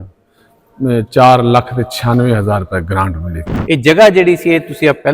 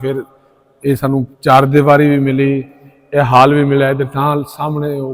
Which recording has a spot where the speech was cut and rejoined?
first; 1 cut; at 3.5 s

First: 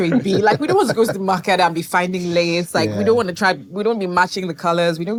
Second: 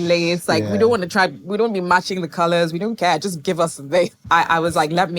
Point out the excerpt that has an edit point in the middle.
second; 1 cut; at 4.2 s

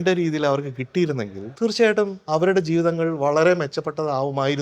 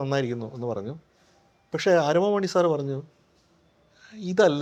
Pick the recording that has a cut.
first; 2 cuts; at 1.4 s, 2.2 s

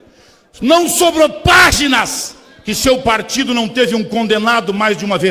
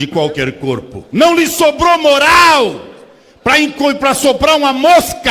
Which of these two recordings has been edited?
second; 1 cut; at 1.0 s

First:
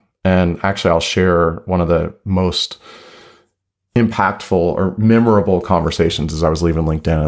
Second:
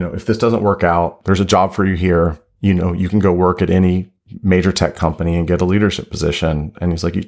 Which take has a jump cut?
second; 1 cut; at 1.2 s

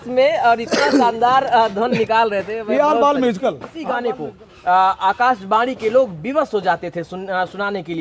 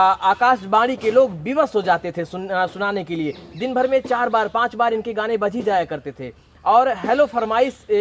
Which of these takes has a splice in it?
first; 1 cut; at 3.7 s

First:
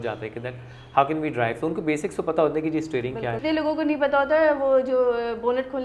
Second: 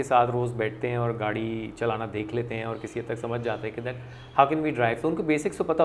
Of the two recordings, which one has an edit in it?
first; 1 cut; at 3.4 s

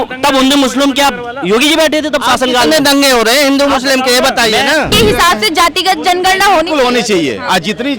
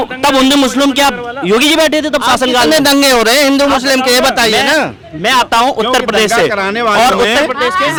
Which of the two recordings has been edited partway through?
first; 1 cut; at 4.9 s

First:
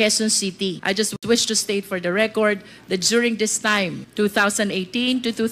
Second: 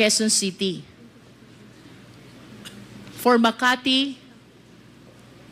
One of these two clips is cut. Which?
first; 2 cuts; at 1.2 s, 4.0 s

